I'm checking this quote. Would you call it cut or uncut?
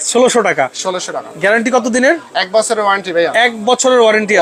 uncut